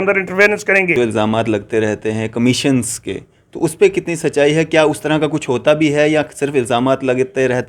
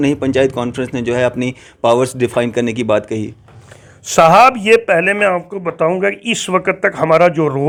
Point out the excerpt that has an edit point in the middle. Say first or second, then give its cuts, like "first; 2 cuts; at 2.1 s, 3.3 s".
first; 1 cut; at 0.9 s